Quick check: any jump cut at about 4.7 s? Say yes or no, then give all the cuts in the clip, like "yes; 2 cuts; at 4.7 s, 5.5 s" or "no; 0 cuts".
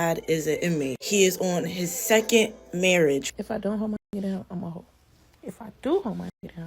no; 1 cut; at 3.3 s